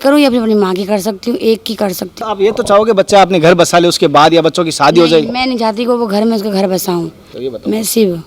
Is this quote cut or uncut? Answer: cut